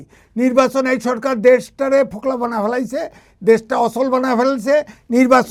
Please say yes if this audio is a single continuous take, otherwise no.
yes